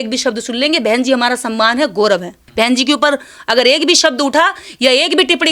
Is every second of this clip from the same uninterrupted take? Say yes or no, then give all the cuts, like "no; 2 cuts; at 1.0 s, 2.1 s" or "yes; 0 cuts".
no; 1 cut; at 2.4 s